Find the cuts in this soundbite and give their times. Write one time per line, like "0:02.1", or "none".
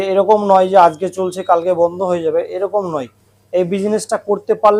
none